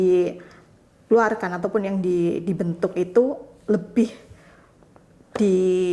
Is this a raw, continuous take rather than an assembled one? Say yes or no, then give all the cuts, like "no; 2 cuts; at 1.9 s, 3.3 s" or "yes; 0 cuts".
yes; 0 cuts